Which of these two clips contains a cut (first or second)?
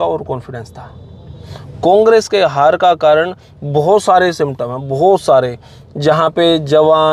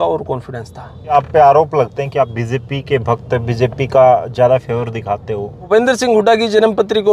second